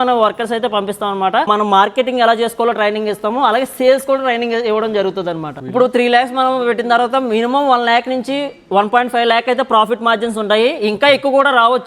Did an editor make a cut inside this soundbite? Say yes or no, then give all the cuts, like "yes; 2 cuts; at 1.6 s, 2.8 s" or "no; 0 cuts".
yes; 2 cuts; at 1.5 s, 5.5 s